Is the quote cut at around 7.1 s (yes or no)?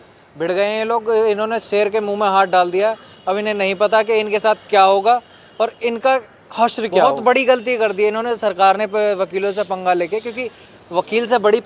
yes